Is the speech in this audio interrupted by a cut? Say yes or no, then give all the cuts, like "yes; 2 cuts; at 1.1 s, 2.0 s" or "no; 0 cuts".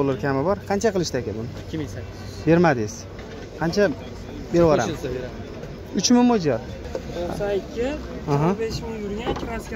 yes; 1 cut; at 6.8 s